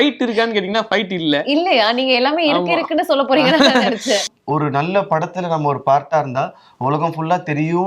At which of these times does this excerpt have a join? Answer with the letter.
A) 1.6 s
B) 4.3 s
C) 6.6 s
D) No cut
B